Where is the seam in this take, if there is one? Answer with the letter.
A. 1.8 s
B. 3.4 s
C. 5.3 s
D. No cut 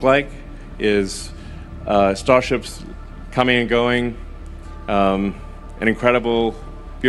C